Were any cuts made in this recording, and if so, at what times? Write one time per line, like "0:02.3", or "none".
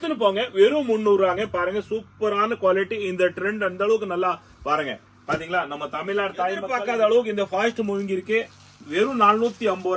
0:06.7